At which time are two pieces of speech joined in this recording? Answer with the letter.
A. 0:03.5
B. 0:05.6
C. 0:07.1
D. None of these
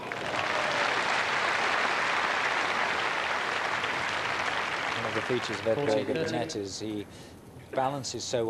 D